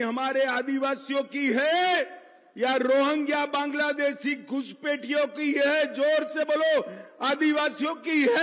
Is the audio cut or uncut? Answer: uncut